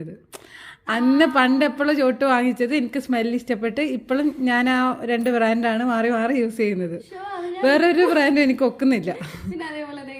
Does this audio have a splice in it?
no; 0 cuts

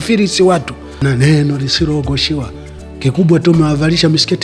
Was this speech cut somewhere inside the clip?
yes; 1 cut; at 1.0 s

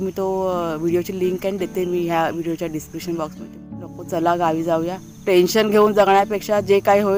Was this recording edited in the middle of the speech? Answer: yes; 1 cut; at 3.7 s

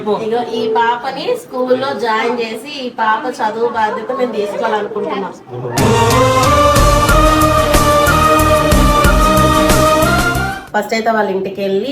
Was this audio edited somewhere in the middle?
yes; 1 cut; at 10.6 s

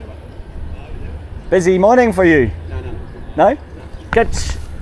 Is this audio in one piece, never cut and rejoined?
yes; 0 cuts

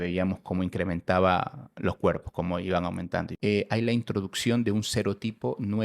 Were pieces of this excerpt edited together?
yes; 1 cut; at 3.3 s

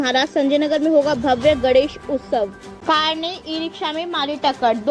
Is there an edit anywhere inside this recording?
yes; 1 cut; at 2.7 s

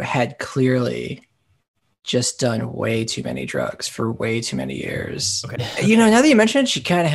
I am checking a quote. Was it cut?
yes; 1 cut; at 5.6 s

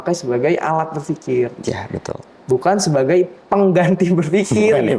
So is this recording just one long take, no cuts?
yes; 0 cuts

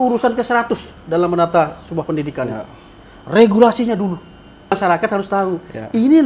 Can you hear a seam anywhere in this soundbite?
yes; 1 cut; at 4.7 s

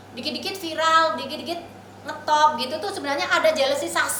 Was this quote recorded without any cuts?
yes; 0 cuts

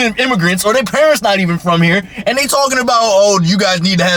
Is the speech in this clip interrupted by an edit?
no; 0 cuts

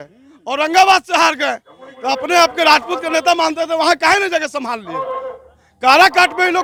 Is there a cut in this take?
no; 0 cuts

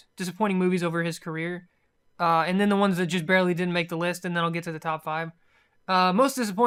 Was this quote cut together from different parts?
no; 0 cuts

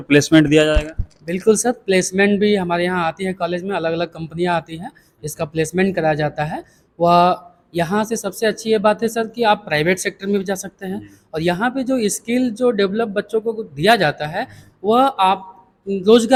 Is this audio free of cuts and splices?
yes; 0 cuts

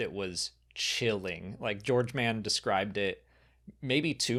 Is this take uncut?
yes; 0 cuts

